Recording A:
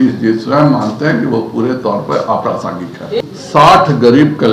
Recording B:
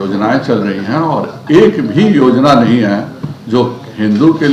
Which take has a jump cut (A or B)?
A